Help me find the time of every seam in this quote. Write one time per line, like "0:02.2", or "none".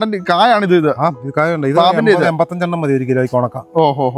none